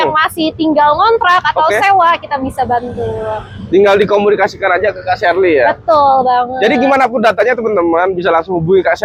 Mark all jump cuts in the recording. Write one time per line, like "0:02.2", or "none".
none